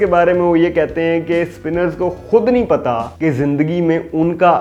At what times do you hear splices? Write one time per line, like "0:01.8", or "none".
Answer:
none